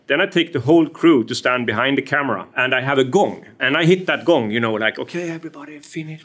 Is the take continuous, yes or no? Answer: no